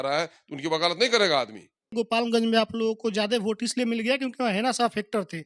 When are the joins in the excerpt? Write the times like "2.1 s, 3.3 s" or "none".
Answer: 1.9 s